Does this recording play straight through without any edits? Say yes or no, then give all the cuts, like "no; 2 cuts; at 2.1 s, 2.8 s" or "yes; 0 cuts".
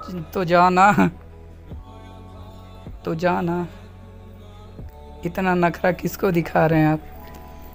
yes; 0 cuts